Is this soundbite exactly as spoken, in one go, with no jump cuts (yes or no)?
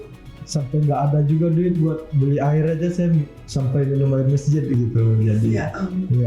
yes